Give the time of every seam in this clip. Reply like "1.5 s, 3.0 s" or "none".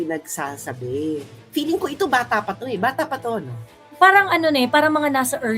1.4 s